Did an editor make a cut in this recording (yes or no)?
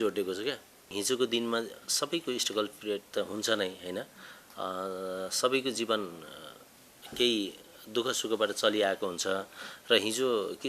yes